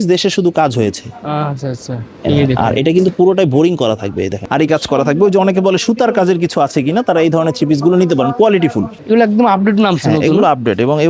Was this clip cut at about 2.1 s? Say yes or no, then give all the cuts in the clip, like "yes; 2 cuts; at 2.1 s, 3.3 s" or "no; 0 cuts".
no; 2 cuts; at 4.4 s, 8.9 s